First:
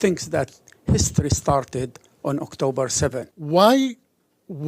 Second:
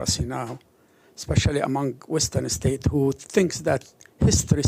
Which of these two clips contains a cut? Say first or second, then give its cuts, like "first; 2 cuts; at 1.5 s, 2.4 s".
first; 1 cut; at 3.3 s